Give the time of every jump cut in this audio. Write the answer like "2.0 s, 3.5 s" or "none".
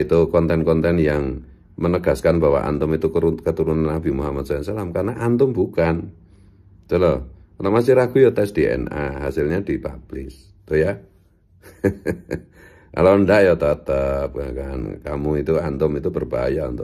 none